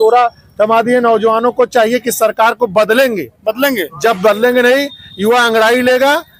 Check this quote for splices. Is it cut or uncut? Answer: uncut